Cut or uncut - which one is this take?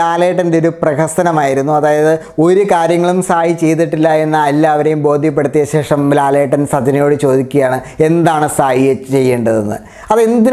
uncut